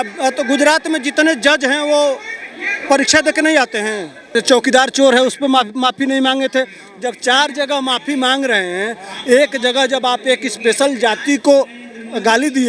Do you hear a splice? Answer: yes; 1 cut; at 4.3 s

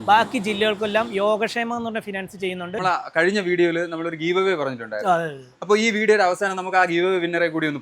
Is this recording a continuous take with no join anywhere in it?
no; 1 cut; at 2.8 s

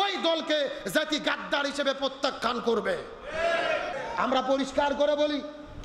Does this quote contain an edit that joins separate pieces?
yes; 1 cut; at 3.9 s

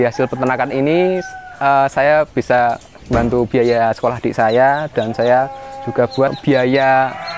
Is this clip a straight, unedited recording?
no; 2 cuts; at 2.9 s, 6.4 s

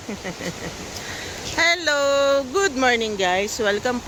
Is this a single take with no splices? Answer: yes; 0 cuts

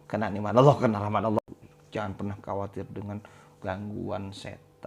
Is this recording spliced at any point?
yes; 1 cut; at 1.4 s

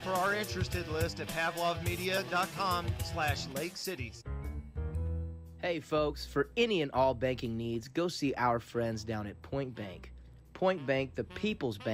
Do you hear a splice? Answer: yes; 2 cuts; at 4.2 s, 8.9 s

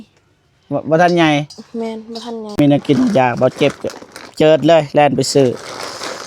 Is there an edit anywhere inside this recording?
yes; 1 cut; at 2.6 s

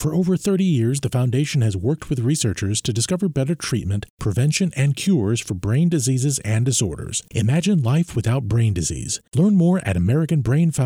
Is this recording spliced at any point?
no; 0 cuts

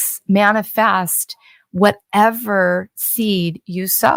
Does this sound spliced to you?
no; 0 cuts

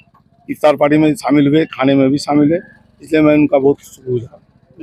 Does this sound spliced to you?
no; 0 cuts

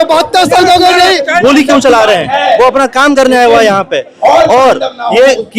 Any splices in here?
yes; 1 cut; at 1.4 s

